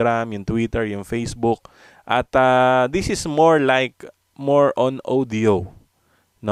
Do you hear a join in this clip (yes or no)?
no